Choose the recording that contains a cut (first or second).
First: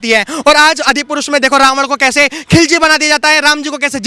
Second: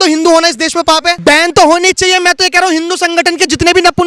second